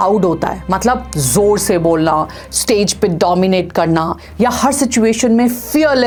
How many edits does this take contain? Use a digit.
0